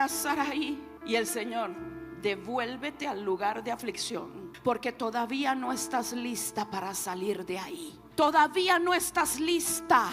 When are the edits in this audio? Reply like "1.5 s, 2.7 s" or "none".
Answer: 0.9 s, 4.4 s, 8.0 s